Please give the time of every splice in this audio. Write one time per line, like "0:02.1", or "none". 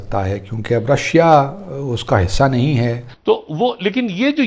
0:03.1